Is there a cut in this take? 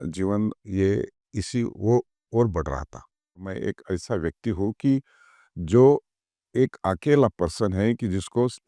yes; 1 cut; at 3.5 s

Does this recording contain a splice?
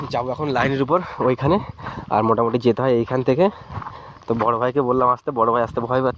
no; 0 cuts

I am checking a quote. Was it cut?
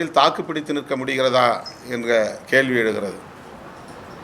no; 0 cuts

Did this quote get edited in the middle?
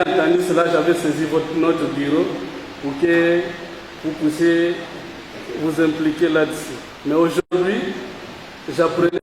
no; 0 cuts

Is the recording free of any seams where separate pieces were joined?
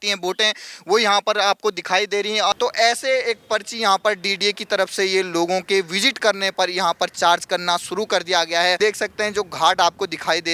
no; 2 cuts; at 2.5 s, 8.8 s

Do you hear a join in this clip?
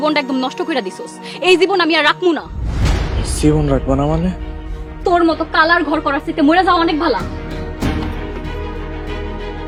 no; 0 cuts

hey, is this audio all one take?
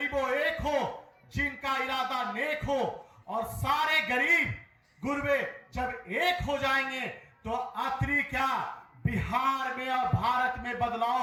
yes; 0 cuts

